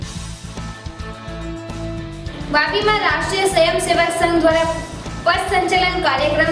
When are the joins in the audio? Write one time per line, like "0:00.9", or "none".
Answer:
none